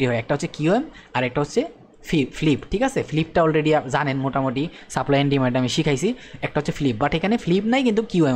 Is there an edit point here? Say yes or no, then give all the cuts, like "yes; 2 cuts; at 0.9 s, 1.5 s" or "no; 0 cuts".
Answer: no; 0 cuts